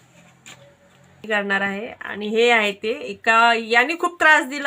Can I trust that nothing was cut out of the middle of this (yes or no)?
no